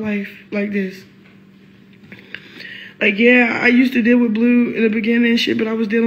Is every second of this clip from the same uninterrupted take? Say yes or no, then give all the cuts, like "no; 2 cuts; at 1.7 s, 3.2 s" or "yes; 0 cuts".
yes; 0 cuts